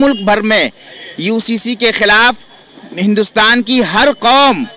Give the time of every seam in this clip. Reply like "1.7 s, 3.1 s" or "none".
none

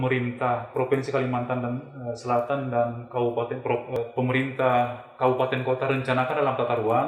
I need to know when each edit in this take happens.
4.0 s

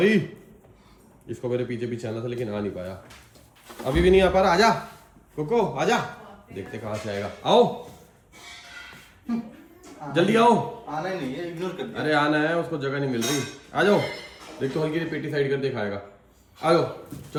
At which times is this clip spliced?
none

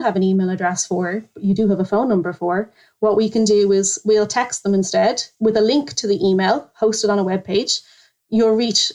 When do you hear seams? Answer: 8.0 s

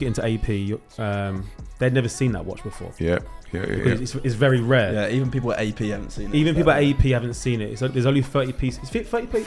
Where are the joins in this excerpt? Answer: none

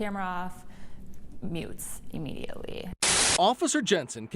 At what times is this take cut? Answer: 3.2 s

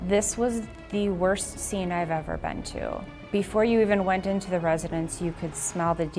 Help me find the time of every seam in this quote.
none

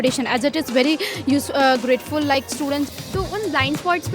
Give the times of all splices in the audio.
2.9 s

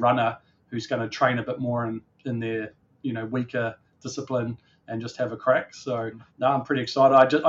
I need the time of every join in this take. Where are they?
6.2 s

